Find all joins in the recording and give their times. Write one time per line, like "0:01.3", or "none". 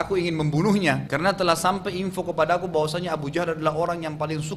0:01.1